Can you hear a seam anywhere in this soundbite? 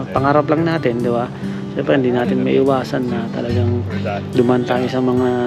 no; 0 cuts

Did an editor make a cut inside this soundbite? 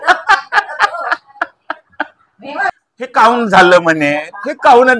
yes; 1 cut; at 2.6 s

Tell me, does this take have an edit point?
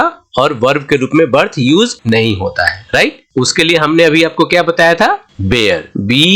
no; 0 cuts

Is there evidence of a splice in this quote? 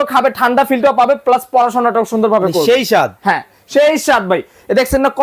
no; 0 cuts

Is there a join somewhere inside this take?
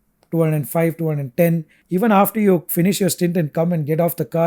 yes; 1 cut; at 1.7 s

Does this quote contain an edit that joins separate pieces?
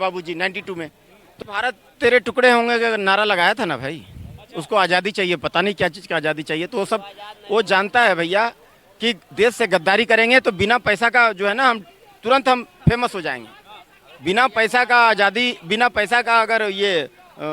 yes; 1 cut; at 1.3 s

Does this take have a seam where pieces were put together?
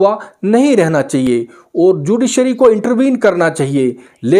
no; 0 cuts

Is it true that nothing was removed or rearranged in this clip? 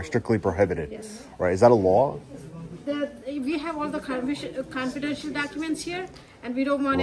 yes; 0 cuts

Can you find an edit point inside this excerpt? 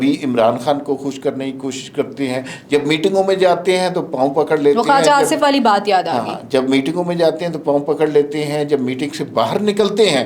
no; 0 cuts

